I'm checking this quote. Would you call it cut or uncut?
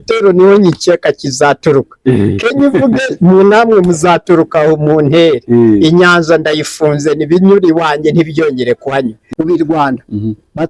cut